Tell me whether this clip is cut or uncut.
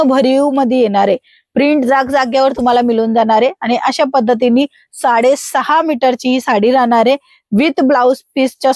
uncut